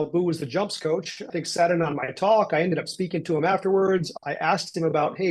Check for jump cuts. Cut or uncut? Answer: cut